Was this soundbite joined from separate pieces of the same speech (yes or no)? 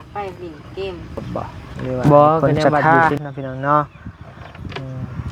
yes